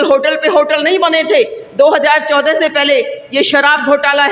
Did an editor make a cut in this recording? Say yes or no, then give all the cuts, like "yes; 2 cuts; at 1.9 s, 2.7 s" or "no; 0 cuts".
no; 0 cuts